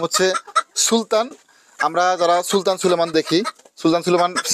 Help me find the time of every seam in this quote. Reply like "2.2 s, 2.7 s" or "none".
none